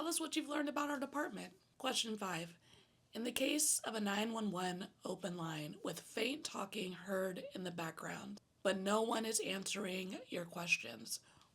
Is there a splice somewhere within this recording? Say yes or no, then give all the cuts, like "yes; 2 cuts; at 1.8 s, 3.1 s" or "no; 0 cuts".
yes; 1 cut; at 1.6 s